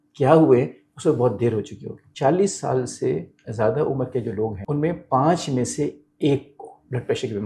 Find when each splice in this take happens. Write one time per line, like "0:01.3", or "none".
0:02.0
0:04.6